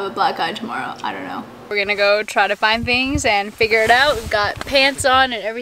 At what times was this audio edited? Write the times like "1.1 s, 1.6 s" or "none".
1.7 s